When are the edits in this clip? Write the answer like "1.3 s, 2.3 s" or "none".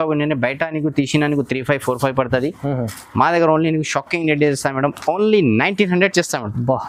none